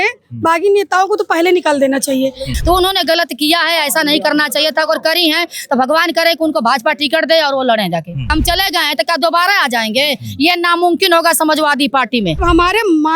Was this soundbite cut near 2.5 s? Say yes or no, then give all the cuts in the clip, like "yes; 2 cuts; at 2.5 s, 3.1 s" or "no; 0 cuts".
yes; 3 cuts; at 2.5 s, 8.3 s, 12.4 s